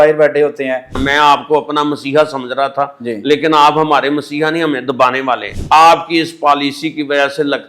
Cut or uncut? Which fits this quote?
cut